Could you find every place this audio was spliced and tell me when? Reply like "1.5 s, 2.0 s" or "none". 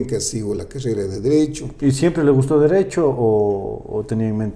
none